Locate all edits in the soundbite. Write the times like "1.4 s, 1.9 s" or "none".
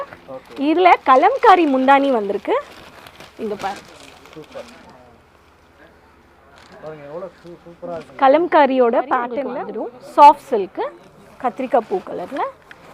9.4 s